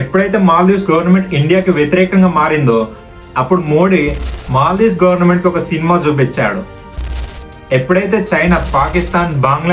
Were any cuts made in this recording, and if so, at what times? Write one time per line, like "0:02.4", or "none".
0:07.2